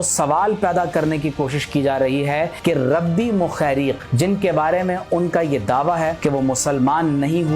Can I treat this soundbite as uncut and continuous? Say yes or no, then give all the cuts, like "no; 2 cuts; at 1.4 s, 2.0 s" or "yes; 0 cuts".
no; 3 cuts; at 2.5 s, 4.1 s, 6.2 s